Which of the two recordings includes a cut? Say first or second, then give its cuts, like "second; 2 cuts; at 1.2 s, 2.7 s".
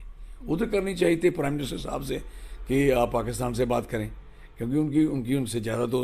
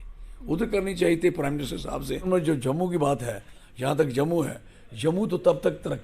second; 1 cut; at 2.3 s